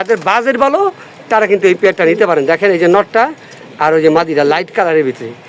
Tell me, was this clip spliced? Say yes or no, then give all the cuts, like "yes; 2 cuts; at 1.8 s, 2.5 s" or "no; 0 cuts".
no; 0 cuts